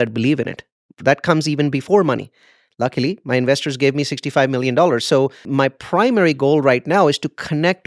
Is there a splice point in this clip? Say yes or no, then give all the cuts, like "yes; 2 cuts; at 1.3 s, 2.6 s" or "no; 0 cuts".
yes; 1 cut; at 5.5 s